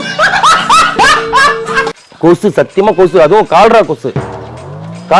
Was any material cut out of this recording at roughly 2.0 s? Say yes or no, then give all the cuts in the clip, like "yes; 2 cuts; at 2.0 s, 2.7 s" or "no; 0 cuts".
yes; 1 cut; at 2.0 s